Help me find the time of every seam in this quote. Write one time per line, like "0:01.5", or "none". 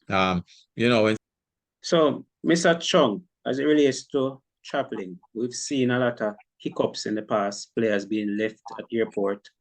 0:01.2